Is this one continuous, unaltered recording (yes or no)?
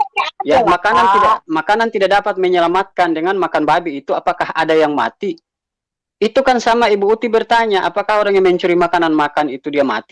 yes